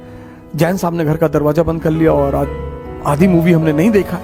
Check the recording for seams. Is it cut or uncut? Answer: uncut